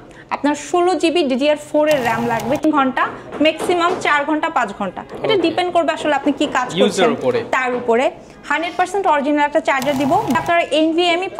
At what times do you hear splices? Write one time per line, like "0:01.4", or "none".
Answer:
0:02.6
0:10.3